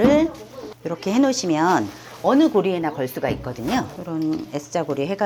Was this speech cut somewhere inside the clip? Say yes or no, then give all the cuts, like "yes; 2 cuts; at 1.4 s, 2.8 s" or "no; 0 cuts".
no; 0 cuts